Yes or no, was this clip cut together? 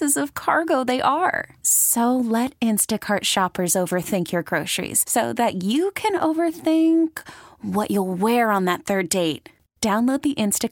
no